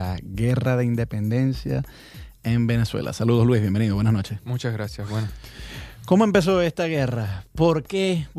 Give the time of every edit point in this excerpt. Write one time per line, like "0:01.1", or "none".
0:05.5

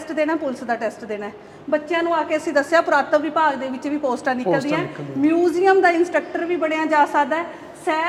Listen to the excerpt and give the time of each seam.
none

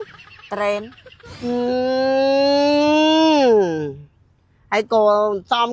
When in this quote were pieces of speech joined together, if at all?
none

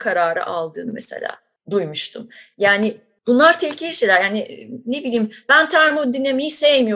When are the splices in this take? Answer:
0:01.5
0:03.1

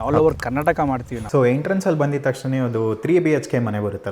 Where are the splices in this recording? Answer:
0:01.1

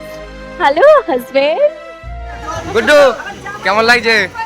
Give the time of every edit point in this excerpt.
0:02.5

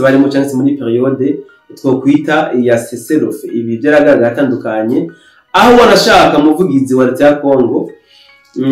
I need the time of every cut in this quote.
none

